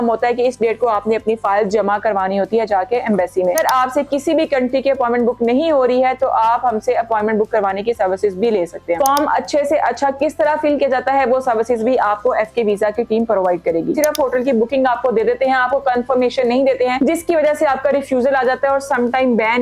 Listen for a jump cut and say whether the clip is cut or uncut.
cut